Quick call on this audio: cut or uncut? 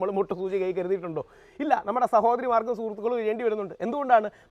uncut